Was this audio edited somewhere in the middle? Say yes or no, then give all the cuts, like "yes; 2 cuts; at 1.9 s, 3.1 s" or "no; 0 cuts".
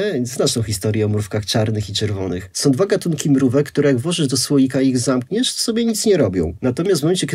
no; 0 cuts